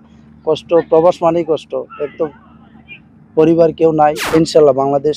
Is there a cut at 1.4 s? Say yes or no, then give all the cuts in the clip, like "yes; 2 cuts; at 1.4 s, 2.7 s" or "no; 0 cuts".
no; 1 cut; at 4.2 s